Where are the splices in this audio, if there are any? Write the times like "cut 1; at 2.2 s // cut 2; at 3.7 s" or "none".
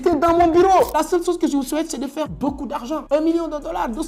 cut 1; at 0.9 s // cut 2; at 2.3 s